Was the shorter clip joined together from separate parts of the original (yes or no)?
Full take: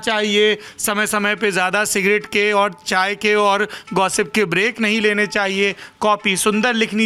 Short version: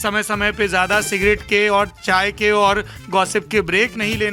no